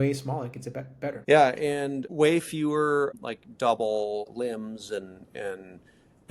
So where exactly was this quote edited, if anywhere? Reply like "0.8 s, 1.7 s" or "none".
1.2 s, 2.0 s, 3.1 s, 4.3 s